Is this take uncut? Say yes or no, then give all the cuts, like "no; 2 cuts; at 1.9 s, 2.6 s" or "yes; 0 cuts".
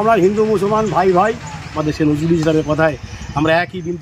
no; 1 cut; at 1.8 s